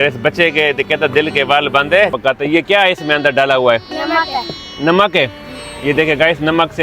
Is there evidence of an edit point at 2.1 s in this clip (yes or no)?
yes